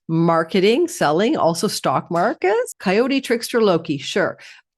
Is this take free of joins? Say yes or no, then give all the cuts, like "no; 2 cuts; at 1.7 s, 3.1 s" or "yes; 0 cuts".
no; 1 cut; at 2.7 s